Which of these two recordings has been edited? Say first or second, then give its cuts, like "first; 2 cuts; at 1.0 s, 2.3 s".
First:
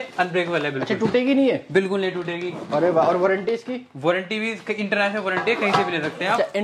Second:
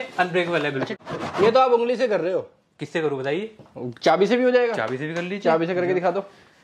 second; 1 cut; at 0.9 s